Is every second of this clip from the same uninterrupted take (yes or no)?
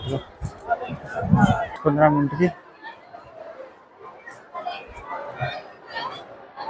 no